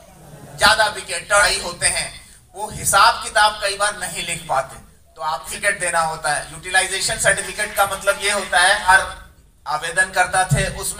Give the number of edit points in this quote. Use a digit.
3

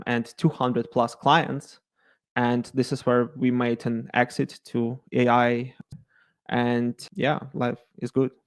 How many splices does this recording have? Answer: 1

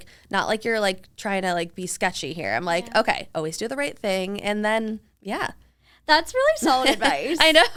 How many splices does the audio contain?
0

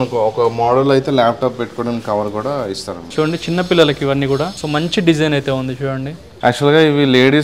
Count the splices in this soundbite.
3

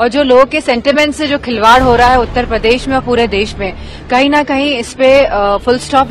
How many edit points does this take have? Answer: 0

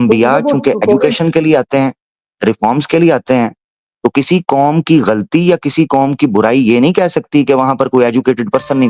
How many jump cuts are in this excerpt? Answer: 0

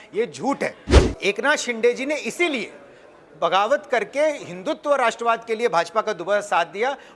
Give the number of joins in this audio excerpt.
1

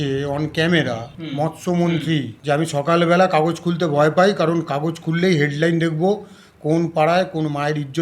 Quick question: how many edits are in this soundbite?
2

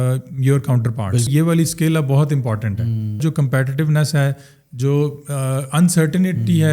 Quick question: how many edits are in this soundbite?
2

